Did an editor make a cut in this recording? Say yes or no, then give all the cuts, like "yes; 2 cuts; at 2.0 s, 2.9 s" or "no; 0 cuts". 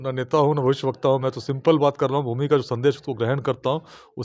no; 0 cuts